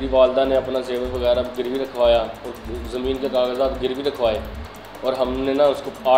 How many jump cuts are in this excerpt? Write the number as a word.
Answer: zero